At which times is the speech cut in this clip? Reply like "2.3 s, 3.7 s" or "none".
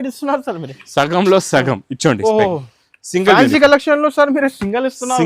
2.2 s